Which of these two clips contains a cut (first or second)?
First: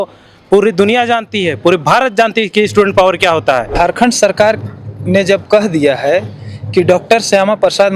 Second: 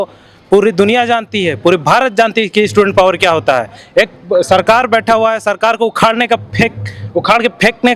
first